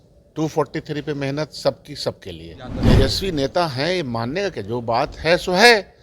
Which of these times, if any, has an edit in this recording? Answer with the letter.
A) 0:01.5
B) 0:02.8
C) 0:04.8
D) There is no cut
B